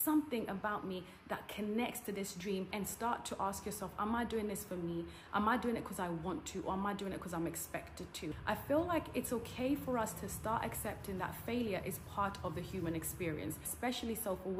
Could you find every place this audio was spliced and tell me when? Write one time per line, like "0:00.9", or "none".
0:02.7
0:08.4
0:13.7